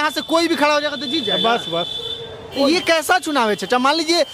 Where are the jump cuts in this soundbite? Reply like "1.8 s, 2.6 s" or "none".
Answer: none